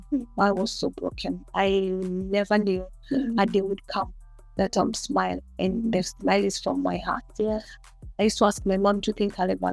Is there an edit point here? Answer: no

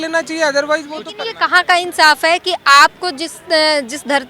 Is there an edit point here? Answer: yes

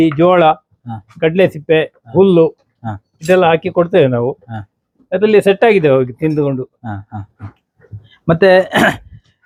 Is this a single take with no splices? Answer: yes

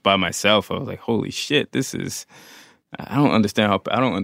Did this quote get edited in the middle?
no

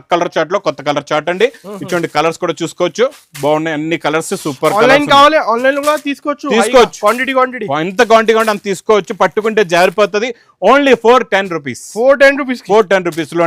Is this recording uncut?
yes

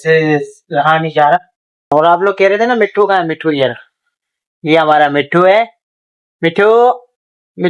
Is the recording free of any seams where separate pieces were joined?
no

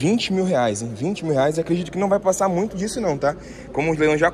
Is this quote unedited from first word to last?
yes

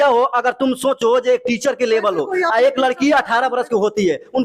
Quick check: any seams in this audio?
no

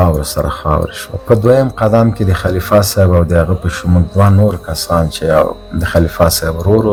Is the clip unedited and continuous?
yes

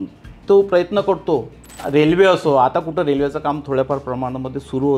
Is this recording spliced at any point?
yes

